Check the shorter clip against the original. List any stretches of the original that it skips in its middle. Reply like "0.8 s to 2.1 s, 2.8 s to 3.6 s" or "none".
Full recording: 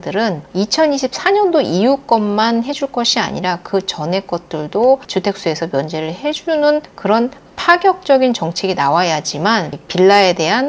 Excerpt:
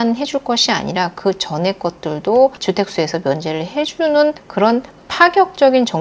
none